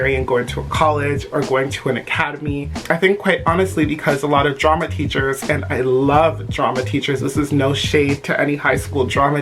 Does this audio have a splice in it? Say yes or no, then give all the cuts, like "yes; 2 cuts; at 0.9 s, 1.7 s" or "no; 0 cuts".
no; 0 cuts